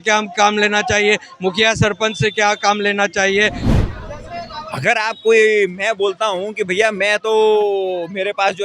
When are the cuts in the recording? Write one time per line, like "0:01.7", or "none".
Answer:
0:03.6